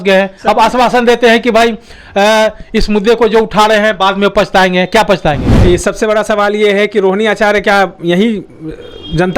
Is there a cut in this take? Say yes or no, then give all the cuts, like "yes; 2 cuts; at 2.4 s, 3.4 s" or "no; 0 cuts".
yes; 1 cut; at 5.5 s